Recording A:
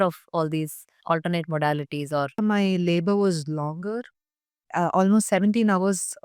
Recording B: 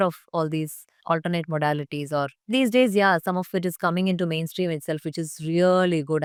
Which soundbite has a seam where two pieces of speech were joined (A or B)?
A